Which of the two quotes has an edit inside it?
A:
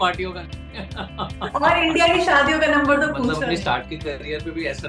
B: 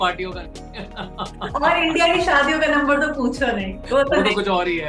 A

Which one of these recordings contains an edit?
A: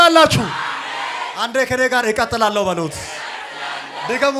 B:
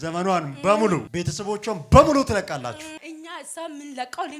B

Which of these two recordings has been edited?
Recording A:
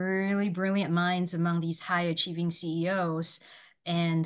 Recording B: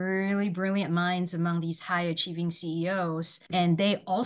B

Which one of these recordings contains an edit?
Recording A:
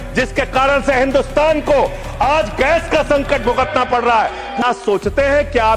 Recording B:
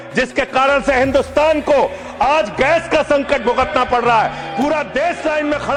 A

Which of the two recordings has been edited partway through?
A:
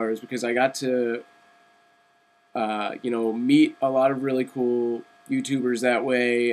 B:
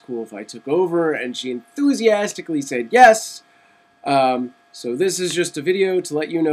A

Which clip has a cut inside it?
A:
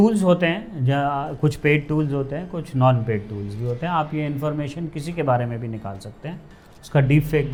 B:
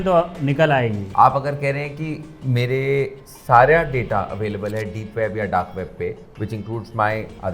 B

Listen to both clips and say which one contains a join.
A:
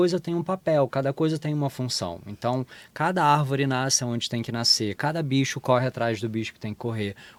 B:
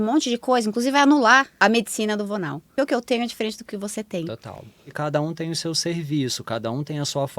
B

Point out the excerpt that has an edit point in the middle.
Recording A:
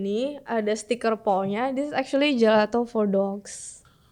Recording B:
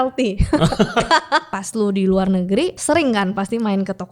B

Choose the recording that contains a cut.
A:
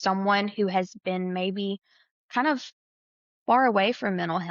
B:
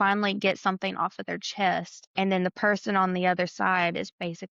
B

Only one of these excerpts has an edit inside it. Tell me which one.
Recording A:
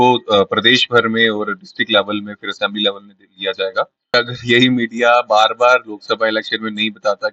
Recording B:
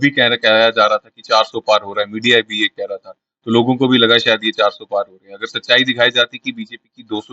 A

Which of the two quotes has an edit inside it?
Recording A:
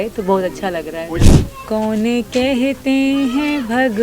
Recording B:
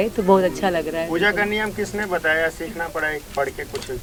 A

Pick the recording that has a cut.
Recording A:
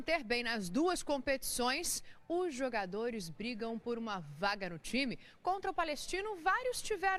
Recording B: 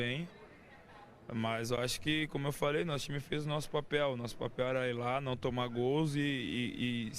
B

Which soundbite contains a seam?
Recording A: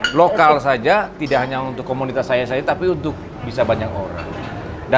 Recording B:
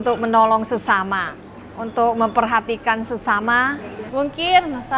B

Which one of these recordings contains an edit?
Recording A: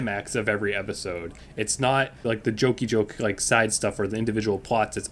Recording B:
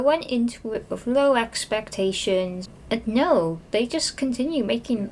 B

